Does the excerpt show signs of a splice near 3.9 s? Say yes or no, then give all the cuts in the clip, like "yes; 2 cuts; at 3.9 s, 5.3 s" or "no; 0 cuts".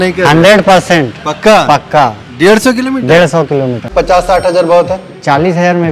yes; 1 cut; at 3.9 s